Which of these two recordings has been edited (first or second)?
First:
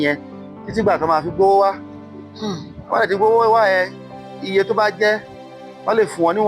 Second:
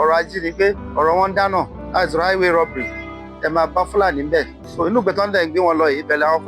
second